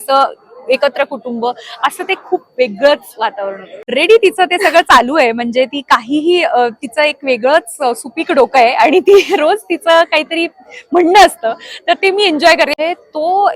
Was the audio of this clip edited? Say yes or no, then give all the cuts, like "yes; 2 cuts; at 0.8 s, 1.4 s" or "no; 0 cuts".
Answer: yes; 2 cuts; at 3.9 s, 12.7 s